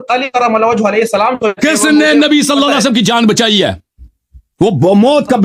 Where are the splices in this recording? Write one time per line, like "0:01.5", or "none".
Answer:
none